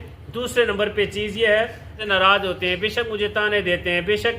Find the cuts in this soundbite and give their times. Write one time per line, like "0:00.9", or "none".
0:02.0